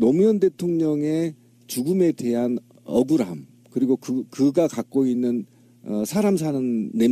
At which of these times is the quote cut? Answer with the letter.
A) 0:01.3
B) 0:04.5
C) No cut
B